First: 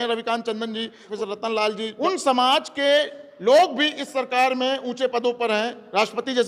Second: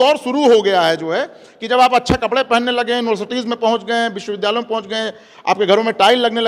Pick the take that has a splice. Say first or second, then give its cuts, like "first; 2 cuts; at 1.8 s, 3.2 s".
first; 2 cuts; at 1.0 s, 1.9 s